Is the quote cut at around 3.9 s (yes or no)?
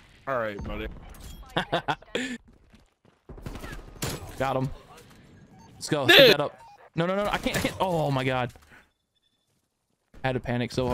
no